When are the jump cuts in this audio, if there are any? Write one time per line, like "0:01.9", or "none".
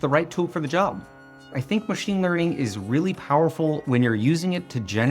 0:01.5